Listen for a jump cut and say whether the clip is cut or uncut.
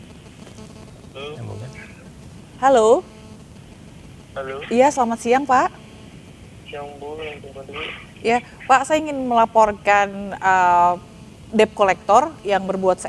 uncut